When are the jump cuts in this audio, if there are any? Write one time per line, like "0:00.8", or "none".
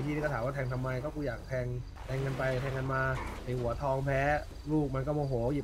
0:01.9
0:03.3
0:04.5